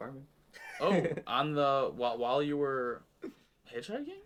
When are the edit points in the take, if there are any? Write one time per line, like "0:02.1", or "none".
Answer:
none